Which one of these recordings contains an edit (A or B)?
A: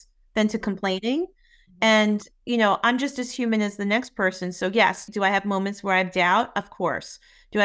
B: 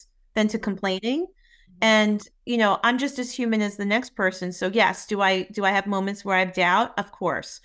A